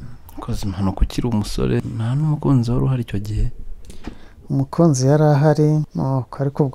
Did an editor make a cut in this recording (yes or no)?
yes